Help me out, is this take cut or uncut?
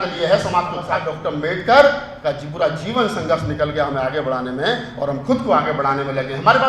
cut